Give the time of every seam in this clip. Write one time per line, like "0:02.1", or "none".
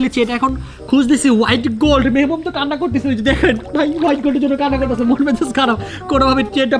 none